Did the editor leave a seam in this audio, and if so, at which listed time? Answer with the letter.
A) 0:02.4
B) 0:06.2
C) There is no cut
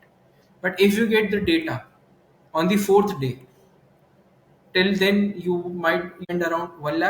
B